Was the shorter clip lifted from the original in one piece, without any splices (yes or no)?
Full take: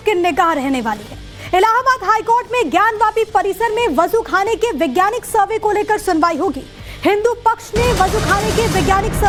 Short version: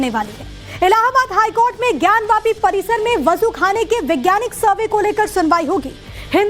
yes